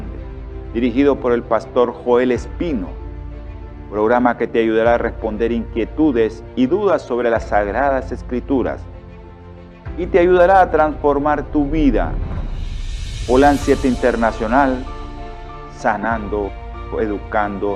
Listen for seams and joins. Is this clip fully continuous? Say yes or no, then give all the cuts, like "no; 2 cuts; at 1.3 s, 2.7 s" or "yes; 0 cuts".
yes; 0 cuts